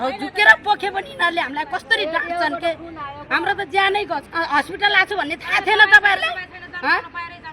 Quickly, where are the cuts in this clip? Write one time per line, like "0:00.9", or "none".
0:04.3